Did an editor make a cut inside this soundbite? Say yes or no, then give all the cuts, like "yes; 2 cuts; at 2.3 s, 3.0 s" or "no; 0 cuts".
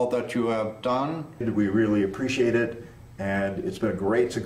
yes; 1 cut; at 1.4 s